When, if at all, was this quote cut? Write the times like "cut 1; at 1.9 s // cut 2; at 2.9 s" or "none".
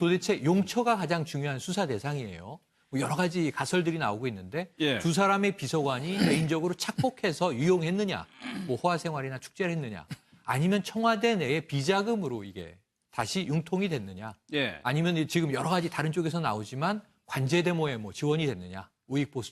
cut 1; at 14.1 s